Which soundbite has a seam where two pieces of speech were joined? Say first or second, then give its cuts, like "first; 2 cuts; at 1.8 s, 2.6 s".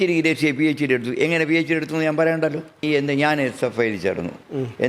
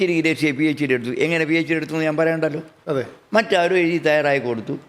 first; 1 cut; at 2.8 s